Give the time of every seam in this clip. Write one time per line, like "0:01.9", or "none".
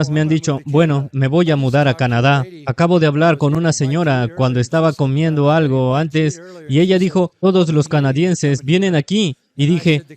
none